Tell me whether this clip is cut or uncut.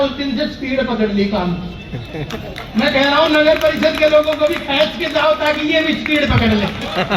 uncut